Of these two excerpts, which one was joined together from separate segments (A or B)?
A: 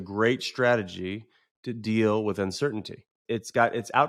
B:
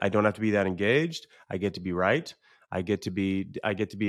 A